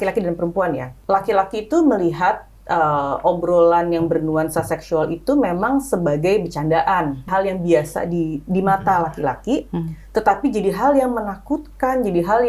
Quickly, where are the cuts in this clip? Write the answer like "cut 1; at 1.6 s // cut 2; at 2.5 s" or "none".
cut 1; at 0.9 s // cut 2; at 7.3 s